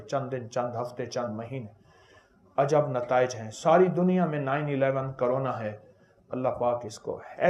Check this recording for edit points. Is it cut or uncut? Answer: uncut